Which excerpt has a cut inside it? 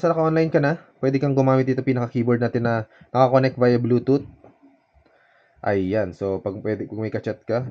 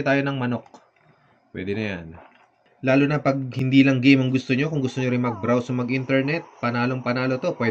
second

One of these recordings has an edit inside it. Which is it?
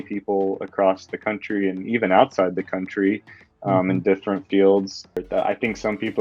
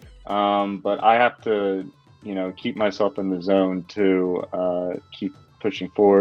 first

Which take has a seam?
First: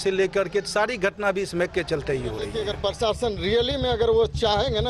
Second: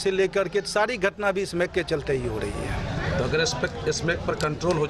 first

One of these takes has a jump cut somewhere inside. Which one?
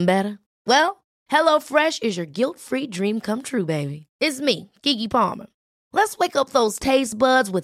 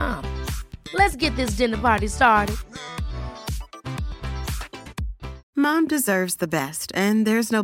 second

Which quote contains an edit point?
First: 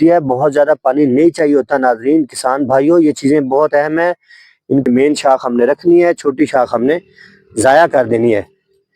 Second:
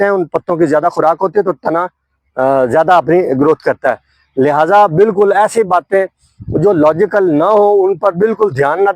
first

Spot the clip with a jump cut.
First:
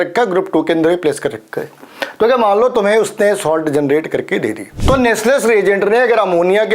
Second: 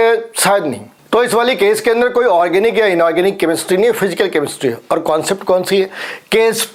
first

